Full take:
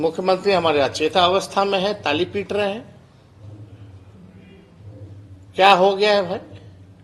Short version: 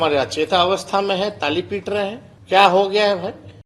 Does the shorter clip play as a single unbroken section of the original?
no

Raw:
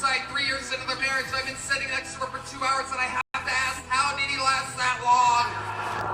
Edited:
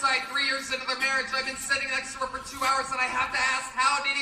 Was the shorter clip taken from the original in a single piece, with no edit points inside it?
no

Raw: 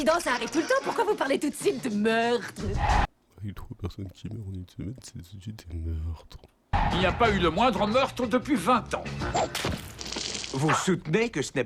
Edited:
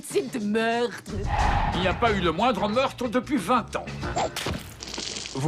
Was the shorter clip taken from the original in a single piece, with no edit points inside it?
no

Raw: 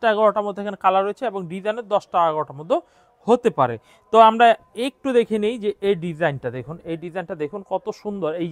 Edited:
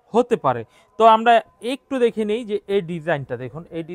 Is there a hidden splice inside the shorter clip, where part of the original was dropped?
no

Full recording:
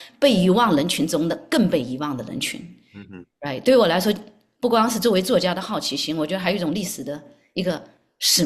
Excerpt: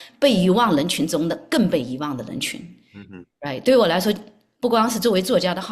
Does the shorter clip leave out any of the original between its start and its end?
no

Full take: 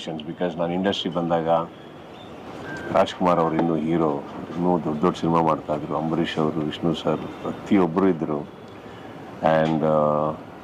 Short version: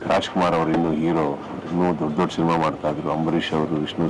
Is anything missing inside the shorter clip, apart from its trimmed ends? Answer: no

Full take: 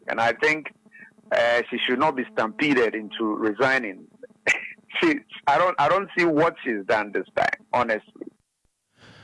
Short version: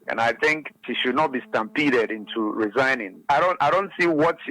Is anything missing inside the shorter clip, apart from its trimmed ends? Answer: yes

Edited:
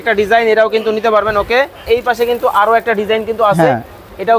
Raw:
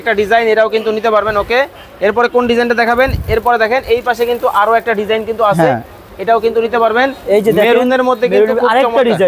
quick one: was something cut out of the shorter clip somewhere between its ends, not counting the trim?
yes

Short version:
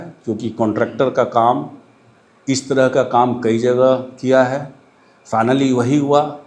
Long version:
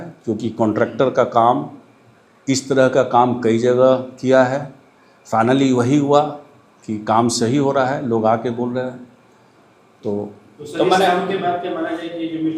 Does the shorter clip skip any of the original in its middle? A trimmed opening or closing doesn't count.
no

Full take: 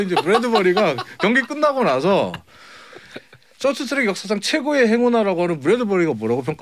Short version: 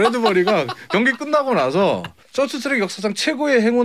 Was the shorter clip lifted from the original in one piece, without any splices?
no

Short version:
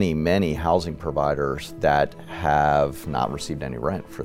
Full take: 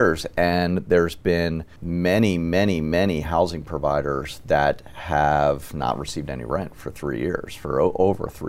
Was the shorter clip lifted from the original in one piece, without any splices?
yes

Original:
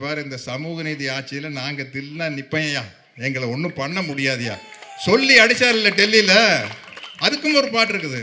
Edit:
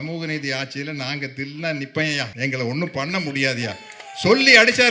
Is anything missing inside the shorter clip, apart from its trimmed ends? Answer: yes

